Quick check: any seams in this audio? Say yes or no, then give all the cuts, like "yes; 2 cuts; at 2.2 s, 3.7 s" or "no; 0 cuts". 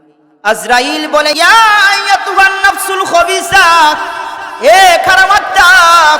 yes; 1 cut; at 1.4 s